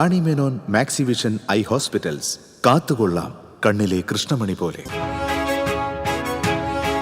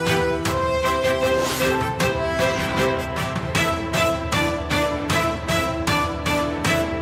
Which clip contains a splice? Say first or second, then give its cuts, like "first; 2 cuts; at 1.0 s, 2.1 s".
first; 1 cut; at 4.8 s